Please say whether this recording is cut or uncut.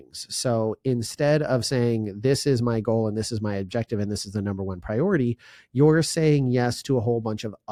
uncut